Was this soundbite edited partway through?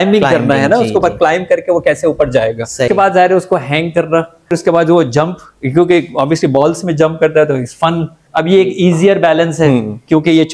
yes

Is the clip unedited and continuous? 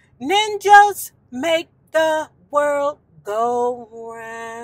yes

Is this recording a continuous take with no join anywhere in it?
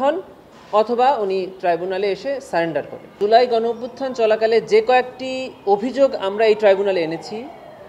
no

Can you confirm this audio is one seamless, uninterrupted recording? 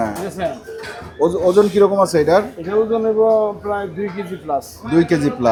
yes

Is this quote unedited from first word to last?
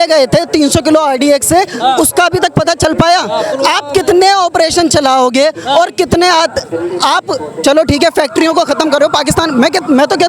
yes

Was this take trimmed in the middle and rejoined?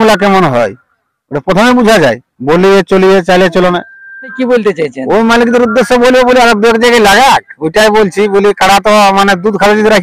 yes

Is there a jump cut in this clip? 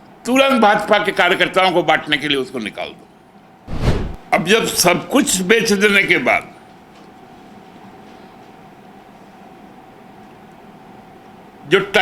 yes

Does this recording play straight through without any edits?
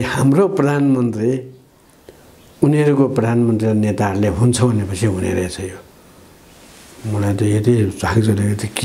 yes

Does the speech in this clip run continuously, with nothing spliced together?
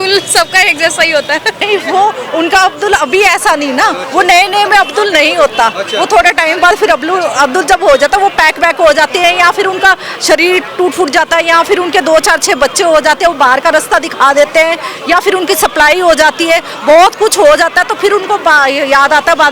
no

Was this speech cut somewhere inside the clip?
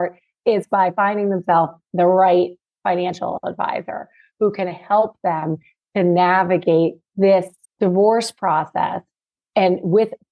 yes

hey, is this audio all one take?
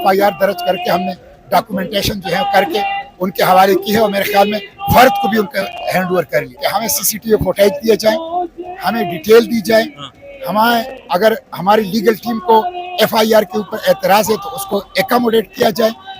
no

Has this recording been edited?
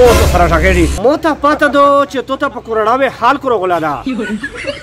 yes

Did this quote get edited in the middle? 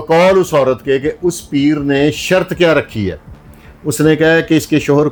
no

